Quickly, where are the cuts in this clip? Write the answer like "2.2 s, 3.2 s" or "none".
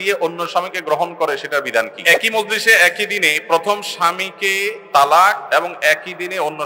2.0 s, 5.4 s